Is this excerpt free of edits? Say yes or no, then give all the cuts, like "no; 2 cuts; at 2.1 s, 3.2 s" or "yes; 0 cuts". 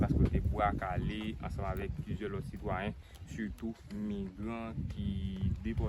yes; 0 cuts